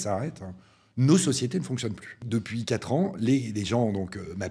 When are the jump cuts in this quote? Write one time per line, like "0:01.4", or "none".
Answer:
0:02.2